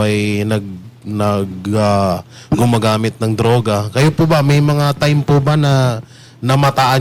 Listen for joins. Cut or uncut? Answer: uncut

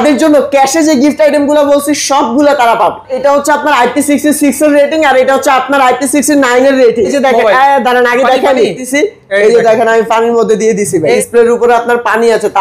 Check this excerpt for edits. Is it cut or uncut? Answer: cut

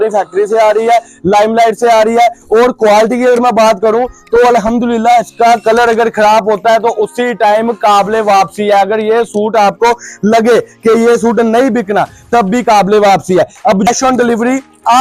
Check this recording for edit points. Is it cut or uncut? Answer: cut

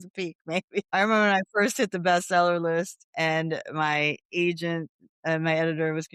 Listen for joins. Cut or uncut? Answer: cut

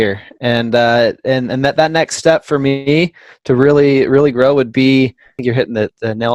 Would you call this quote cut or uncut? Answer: cut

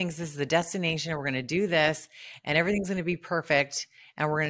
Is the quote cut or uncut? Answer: uncut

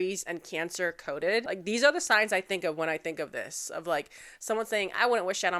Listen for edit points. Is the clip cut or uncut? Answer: cut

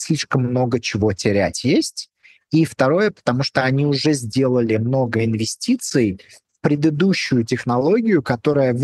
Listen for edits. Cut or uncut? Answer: uncut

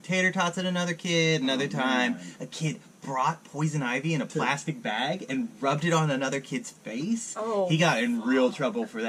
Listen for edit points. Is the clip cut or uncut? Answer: uncut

